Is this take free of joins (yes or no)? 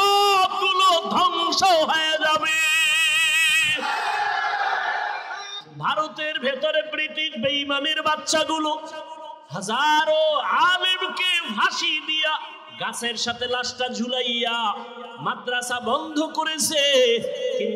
no